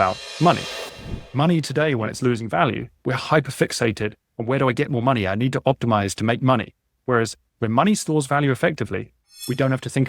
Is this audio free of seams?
yes; 0 cuts

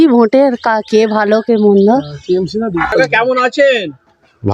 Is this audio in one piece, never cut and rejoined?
no; 1 cut; at 2.8 s

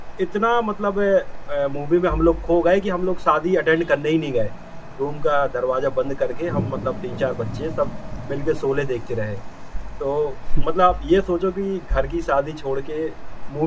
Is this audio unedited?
yes; 0 cuts

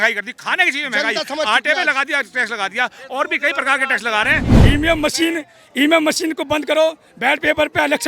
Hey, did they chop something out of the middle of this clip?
yes; 1 cut; at 4.5 s

